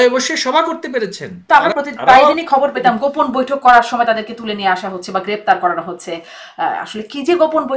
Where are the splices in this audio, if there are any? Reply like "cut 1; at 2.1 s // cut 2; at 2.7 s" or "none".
cut 1; at 1.3 s